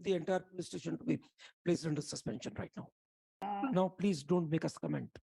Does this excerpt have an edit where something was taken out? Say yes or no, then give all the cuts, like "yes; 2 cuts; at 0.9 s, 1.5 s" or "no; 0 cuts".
yes; 1 cut; at 3.4 s